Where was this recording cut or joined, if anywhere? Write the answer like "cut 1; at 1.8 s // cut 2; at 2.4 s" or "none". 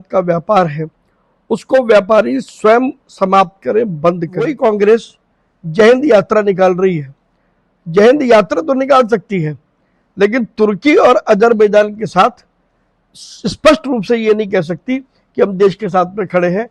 cut 1; at 4.5 s